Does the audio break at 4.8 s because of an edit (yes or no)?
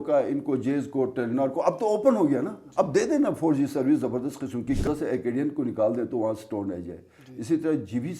yes